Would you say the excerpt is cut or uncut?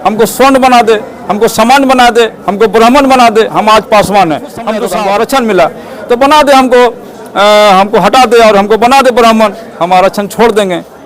cut